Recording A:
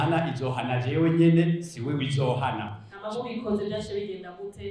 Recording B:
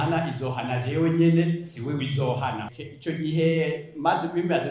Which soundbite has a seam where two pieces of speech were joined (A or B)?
B